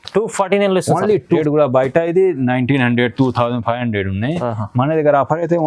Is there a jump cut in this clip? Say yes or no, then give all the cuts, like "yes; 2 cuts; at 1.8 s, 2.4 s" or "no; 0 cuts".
yes; 1 cut; at 1.4 s